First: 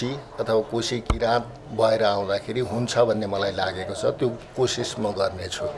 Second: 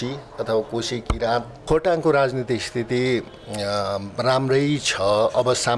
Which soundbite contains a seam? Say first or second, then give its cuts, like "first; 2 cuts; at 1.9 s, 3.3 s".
second; 1 cut; at 1.5 s